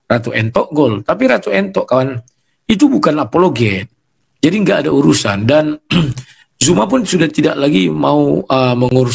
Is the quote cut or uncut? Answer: uncut